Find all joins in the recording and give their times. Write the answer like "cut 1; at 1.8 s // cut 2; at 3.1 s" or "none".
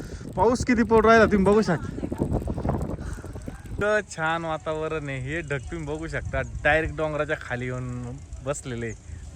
cut 1; at 3.6 s